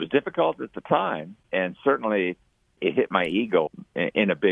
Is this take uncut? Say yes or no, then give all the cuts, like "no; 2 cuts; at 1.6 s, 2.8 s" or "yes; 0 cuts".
no; 3 cuts; at 1.4 s, 2.8 s, 3.7 s